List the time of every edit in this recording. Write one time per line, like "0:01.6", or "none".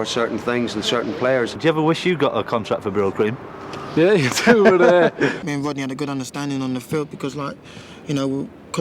0:01.6
0:05.4